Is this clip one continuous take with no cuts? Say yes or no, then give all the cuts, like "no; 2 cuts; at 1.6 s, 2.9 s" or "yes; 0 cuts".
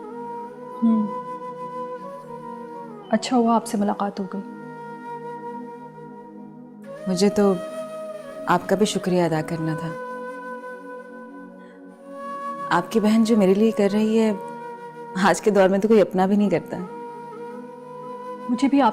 no; 1 cut; at 13.5 s